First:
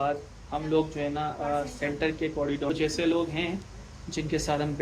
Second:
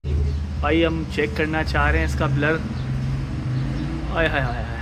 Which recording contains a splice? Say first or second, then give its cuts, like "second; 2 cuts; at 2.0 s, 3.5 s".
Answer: first; 1 cut; at 2.7 s